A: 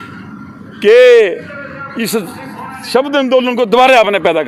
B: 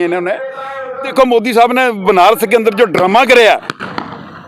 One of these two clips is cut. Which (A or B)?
B